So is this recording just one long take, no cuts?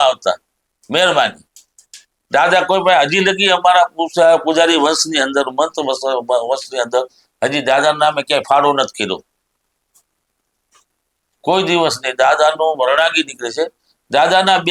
yes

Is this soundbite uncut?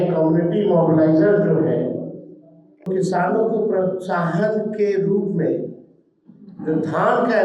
no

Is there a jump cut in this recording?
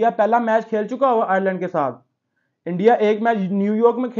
no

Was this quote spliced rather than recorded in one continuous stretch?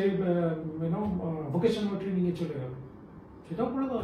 no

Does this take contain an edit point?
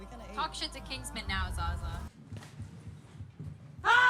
no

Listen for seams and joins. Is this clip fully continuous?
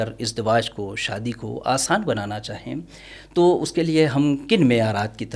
yes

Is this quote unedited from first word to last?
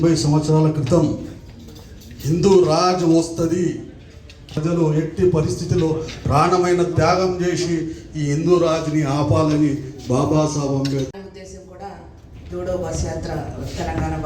no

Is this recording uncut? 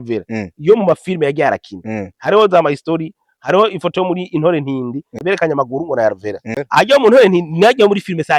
no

